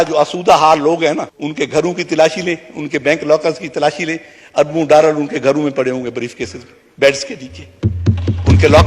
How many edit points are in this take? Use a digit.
1